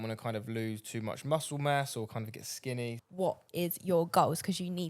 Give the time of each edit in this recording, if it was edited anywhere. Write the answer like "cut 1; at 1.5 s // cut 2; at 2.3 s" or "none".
cut 1; at 3.0 s